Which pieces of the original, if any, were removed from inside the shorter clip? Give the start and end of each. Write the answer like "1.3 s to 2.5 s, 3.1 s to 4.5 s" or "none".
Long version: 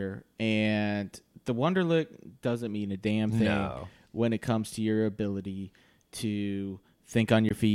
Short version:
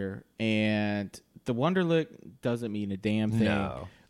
none